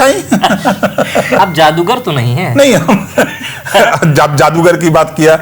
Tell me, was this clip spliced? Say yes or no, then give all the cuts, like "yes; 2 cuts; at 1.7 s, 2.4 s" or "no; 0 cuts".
yes; 1 cut; at 1.4 s